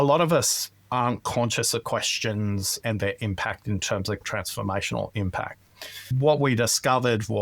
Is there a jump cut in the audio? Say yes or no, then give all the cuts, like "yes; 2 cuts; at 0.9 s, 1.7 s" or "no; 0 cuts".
yes; 3 cuts; at 2.8 s, 4.2 s, 6.1 s